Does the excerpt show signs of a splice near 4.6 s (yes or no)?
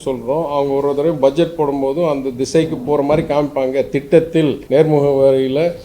yes